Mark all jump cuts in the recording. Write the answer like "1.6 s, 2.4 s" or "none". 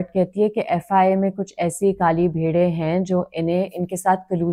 none